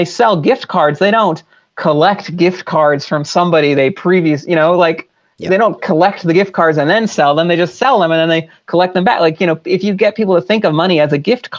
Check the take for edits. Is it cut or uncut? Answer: uncut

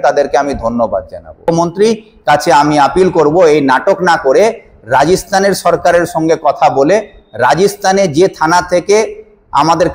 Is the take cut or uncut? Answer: cut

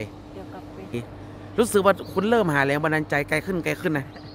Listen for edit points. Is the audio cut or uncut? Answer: cut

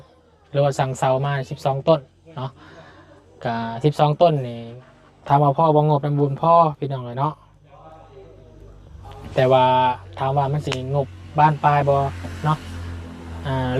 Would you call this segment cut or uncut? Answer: uncut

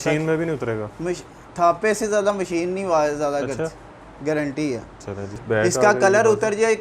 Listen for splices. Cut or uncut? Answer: cut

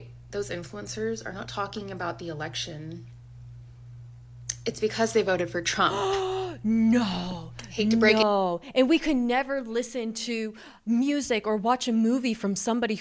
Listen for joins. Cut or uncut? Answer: uncut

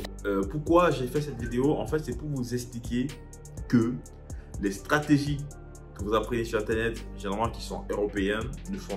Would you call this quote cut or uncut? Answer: uncut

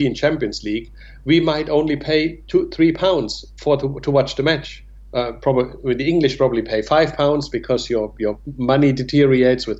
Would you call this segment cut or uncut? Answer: uncut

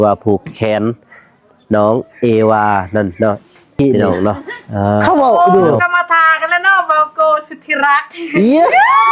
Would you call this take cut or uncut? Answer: cut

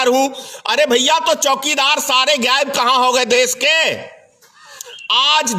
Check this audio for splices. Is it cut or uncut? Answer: uncut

